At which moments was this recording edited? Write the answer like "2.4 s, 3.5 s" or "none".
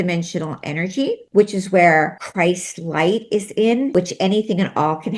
1.2 s, 2.2 s, 3.9 s